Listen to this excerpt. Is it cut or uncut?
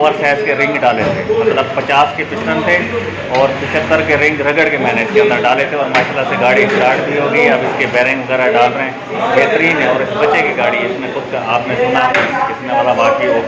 uncut